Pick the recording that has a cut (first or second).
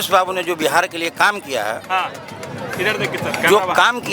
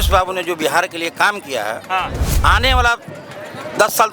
second